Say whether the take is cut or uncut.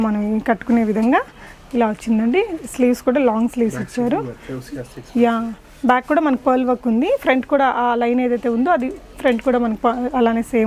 uncut